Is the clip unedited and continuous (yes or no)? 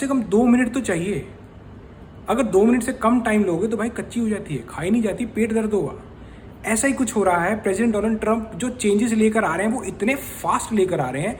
yes